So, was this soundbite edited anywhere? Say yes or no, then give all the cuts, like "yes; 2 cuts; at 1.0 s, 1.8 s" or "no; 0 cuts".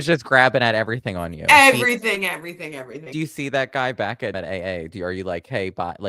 yes; 2 cuts; at 3.1 s, 4.3 s